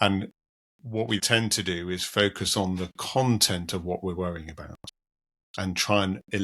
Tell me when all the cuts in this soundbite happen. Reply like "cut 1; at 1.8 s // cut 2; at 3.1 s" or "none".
cut 1; at 1.2 s